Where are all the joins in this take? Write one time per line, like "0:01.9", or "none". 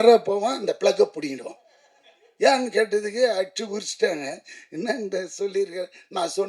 none